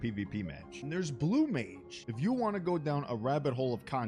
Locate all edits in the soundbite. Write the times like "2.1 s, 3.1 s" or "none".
none

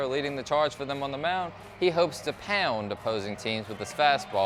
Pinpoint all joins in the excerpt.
none

